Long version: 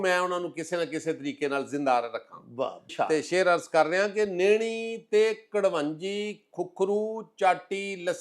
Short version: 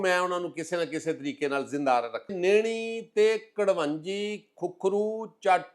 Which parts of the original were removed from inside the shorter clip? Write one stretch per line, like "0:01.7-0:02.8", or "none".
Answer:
0:02.4-0:04.3